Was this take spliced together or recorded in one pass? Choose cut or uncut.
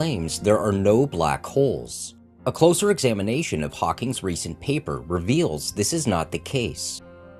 cut